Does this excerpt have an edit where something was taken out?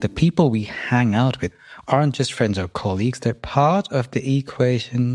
yes; 1 cut; at 1.5 s

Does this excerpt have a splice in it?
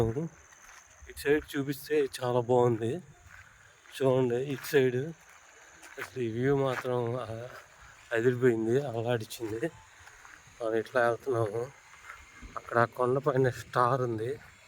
no; 0 cuts

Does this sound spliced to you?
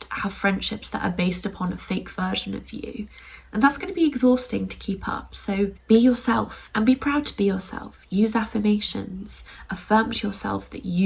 yes; 1 cut; at 5.8 s

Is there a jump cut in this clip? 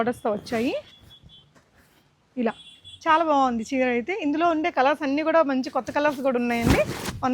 no; 0 cuts

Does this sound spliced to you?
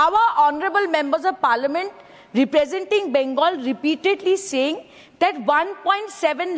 no; 0 cuts

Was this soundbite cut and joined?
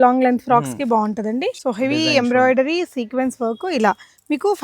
yes; 1 cut; at 1.6 s

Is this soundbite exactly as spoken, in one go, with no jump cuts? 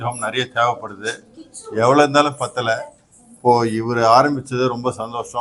yes; 0 cuts

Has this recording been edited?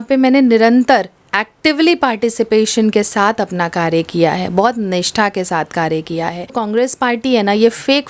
yes; 1 cut; at 6.6 s

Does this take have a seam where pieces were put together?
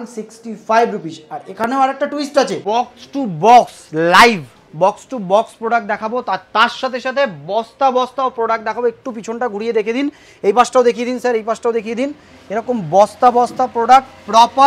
yes; 1 cut; at 2.6 s

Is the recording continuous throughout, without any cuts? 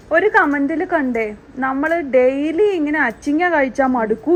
yes; 0 cuts

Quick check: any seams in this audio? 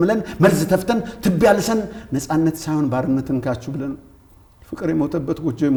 no; 0 cuts

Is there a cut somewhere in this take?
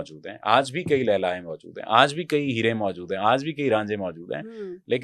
no; 0 cuts

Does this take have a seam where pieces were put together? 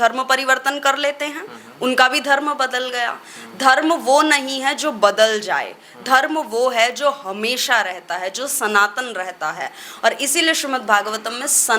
no; 0 cuts

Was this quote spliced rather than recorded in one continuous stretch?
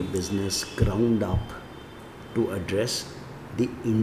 no; 0 cuts

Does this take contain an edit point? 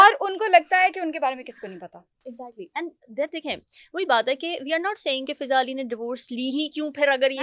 no; 0 cuts

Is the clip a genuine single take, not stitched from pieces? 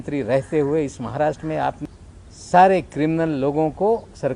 no; 1 cut; at 1.8 s

